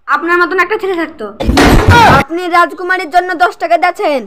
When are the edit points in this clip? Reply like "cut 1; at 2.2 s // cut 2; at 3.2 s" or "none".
cut 1; at 2.2 s